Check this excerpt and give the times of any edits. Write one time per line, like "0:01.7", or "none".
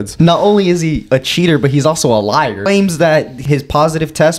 0:02.7
0:03.4